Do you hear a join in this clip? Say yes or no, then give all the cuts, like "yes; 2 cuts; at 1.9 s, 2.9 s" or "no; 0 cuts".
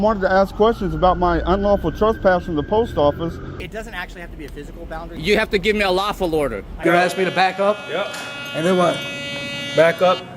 yes; 3 cuts; at 3.7 s, 5.1 s, 6.8 s